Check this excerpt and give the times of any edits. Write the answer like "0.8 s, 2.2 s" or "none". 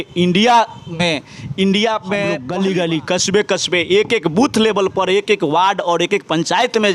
2.4 s